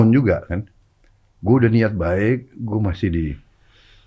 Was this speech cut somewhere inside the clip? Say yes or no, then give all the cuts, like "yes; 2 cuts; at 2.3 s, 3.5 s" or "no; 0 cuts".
no; 0 cuts